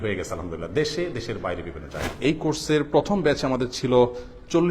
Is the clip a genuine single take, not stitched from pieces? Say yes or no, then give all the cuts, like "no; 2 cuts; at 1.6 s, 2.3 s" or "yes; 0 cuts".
no; 1 cut; at 2.1 s